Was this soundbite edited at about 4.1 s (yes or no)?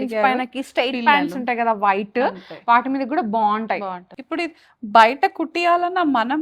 yes